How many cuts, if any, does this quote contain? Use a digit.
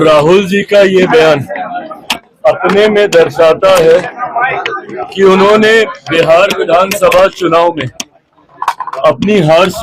0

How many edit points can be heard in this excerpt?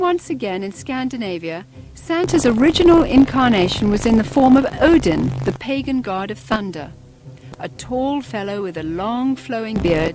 1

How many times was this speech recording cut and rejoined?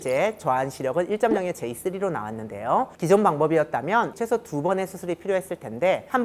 2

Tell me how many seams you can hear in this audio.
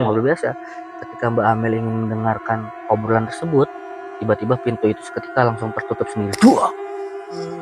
1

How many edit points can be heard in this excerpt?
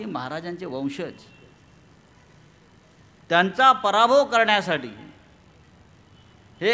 0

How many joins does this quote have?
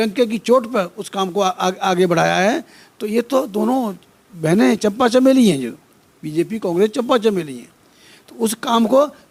0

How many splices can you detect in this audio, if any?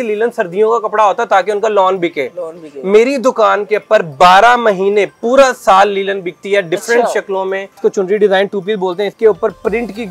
2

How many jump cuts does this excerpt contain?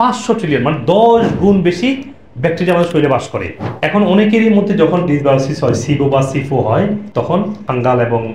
1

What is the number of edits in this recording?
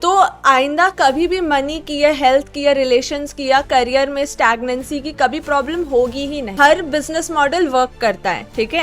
1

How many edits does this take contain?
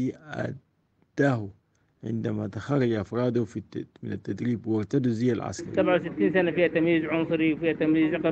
1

